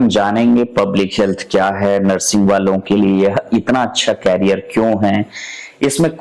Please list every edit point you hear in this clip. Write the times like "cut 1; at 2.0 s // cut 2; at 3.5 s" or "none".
none